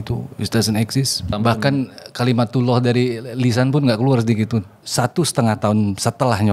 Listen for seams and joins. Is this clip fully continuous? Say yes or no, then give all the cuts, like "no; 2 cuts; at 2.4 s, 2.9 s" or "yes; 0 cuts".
no; 2 cuts; at 1.3 s, 4.8 s